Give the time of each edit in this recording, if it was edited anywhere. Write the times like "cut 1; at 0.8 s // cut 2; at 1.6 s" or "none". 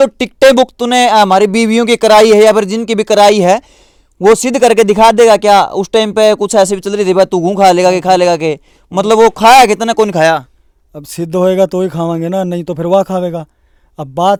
none